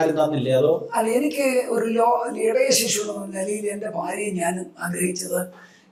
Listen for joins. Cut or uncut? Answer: uncut